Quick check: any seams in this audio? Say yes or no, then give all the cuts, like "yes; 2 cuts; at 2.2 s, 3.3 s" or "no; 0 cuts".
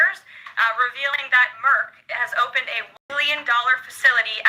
yes; 1 cut; at 2.9 s